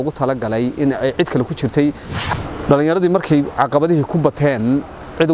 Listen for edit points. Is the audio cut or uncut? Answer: cut